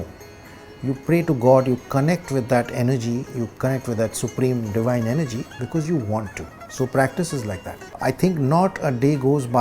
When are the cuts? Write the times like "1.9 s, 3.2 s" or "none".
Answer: 7.9 s